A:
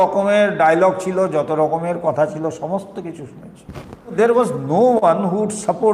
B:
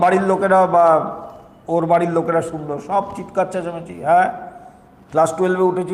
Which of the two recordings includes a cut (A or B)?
A